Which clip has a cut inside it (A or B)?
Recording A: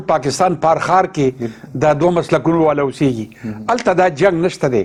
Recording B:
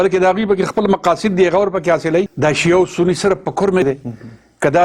B